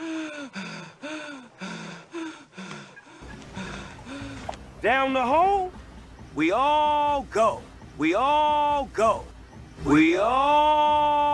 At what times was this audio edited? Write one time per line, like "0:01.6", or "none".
none

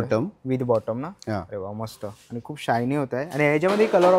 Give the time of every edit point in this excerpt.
none

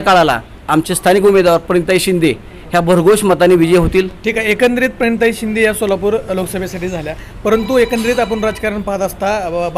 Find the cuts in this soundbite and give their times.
none

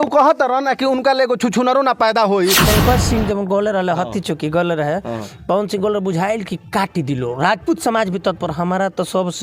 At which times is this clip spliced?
0:02.7

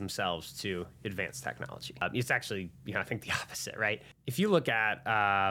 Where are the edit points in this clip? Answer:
0:02.0
0:04.1

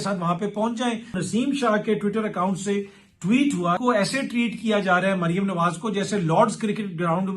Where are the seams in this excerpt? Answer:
0:01.2
0:03.8

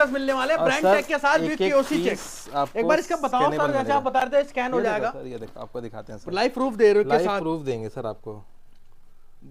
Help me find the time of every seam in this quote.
none

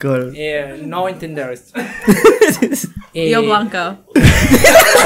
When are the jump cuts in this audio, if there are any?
none

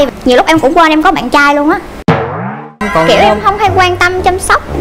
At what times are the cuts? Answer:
0:02.9

